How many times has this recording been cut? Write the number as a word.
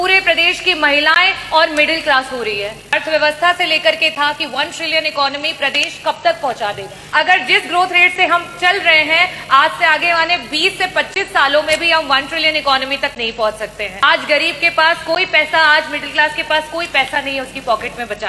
three